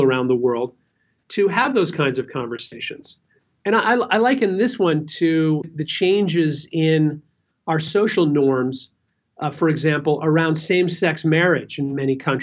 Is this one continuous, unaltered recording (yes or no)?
no